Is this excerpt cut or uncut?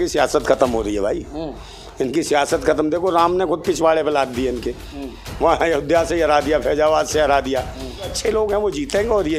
cut